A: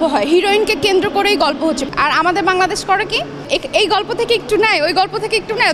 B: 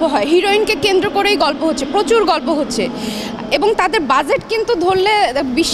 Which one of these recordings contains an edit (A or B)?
A